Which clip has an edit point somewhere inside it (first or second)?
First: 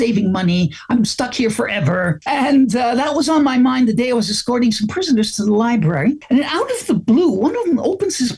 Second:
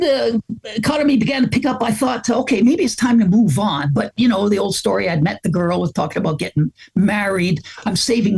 first